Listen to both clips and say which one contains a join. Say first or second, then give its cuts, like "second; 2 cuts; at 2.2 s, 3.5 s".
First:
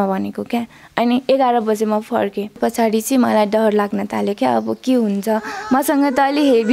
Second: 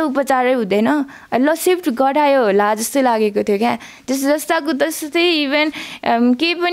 first; 1 cut; at 2.6 s